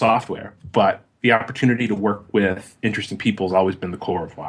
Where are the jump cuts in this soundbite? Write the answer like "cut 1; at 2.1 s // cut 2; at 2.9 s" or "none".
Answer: none